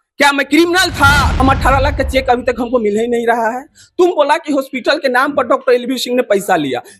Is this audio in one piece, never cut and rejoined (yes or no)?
no